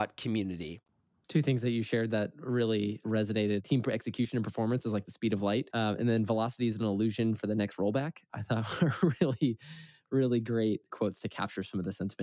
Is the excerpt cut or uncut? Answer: uncut